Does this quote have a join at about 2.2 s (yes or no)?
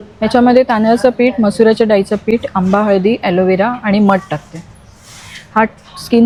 no